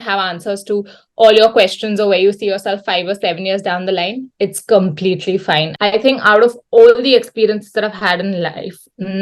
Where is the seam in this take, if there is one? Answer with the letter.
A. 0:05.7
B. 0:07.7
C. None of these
A